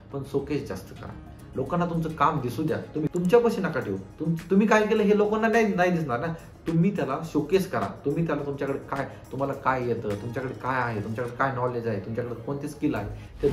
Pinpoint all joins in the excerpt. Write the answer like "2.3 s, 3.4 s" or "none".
3.1 s